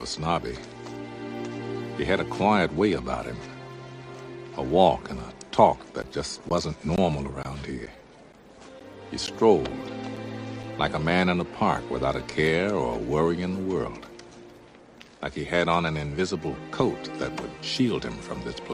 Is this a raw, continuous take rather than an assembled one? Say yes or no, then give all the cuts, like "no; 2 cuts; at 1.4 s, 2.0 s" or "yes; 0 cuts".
yes; 0 cuts